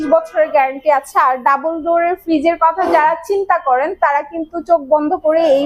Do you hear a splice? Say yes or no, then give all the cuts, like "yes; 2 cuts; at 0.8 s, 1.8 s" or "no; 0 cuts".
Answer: no; 0 cuts